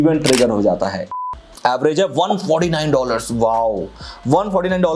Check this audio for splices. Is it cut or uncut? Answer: cut